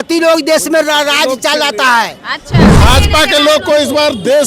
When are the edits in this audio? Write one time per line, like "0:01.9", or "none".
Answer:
0:02.8

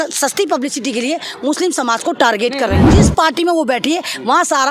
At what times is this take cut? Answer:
0:02.8

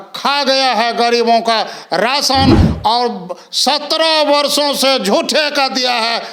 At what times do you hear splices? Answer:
none

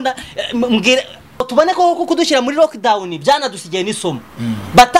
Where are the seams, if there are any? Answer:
0:01.4

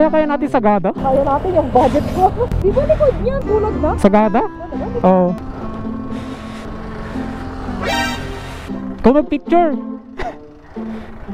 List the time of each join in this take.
0:02.5
0:05.4

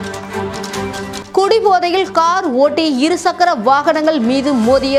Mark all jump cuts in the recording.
none

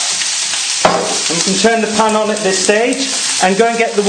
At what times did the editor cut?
none

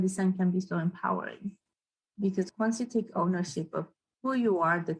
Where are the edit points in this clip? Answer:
0:02.5

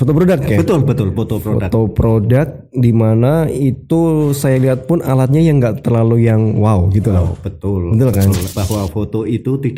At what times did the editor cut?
0:08.5

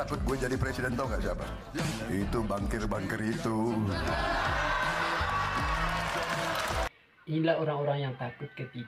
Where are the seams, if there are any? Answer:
none

